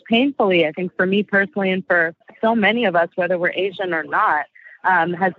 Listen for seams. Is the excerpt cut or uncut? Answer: cut